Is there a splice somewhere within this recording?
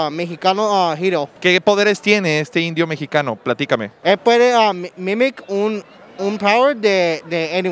yes; 2 cuts; at 1.3 s, 4.0 s

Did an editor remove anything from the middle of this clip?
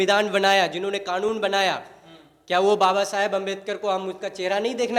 no; 0 cuts

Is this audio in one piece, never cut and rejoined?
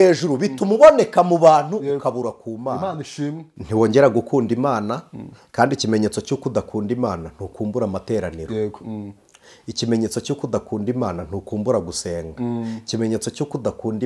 no; 1 cut; at 3.5 s

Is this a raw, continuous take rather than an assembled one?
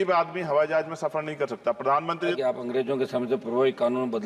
no; 1 cut; at 2.3 s

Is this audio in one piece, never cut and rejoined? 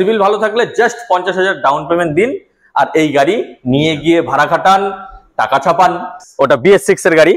no; 1 cut; at 6.1 s

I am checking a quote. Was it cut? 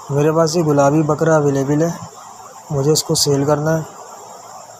no; 0 cuts

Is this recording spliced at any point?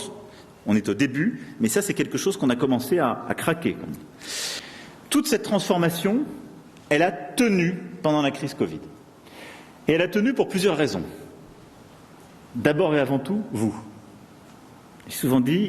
yes; 1 cut; at 4.5 s

